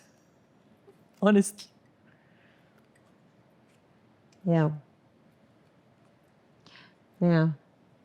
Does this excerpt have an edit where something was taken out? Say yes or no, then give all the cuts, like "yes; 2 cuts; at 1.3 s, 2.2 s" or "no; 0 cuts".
no; 0 cuts